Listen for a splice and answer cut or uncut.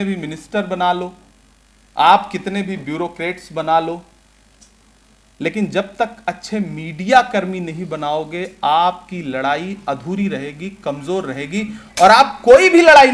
uncut